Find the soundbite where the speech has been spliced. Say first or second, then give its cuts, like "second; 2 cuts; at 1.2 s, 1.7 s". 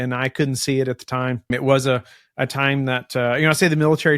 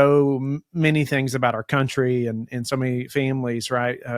first; 1 cut; at 1.5 s